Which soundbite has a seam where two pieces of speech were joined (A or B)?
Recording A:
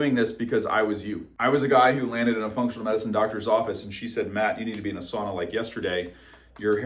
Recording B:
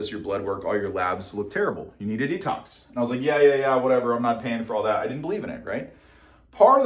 A